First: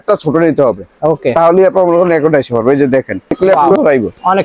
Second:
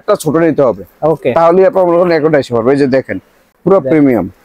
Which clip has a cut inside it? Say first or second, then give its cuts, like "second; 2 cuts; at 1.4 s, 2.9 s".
first; 1 cut; at 3.4 s